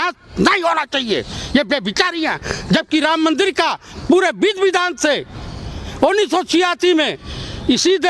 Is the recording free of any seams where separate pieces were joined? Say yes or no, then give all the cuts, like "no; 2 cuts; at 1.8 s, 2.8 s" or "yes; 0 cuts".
yes; 0 cuts